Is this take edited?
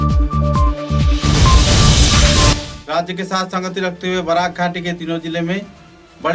yes; 1 cut; at 2.7 s

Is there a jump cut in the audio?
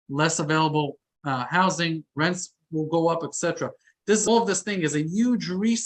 yes; 1 cut; at 4.3 s

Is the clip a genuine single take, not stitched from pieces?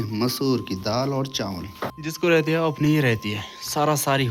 no; 1 cut; at 1.9 s

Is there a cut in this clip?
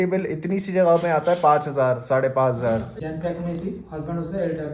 yes; 1 cut; at 2.9 s

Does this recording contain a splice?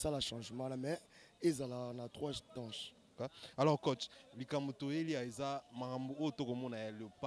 yes; 1 cut; at 3.0 s

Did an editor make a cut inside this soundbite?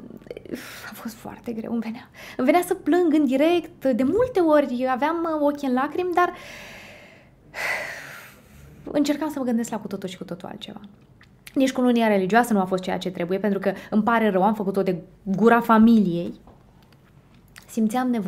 no; 0 cuts

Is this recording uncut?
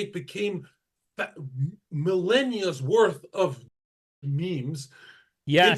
yes; 0 cuts

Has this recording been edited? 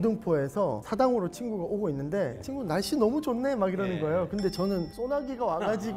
no; 0 cuts

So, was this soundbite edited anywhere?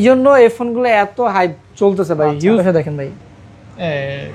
yes; 1 cut; at 2.6 s

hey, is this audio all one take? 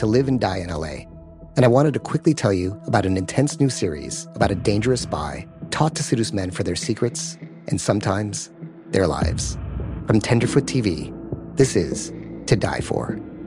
yes; 0 cuts

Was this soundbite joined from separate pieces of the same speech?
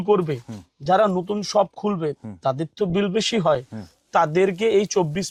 no; 0 cuts

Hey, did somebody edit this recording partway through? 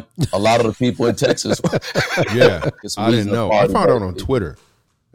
yes; 1 cut; at 2.9 s

